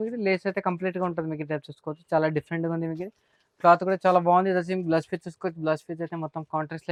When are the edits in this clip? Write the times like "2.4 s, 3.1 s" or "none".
none